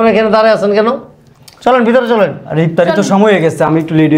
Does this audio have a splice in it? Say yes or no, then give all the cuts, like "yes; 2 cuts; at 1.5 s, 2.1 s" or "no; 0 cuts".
no; 0 cuts